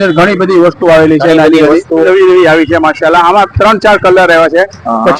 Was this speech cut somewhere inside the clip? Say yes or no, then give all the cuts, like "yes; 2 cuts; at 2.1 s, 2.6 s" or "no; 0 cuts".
yes; 1 cut; at 2.0 s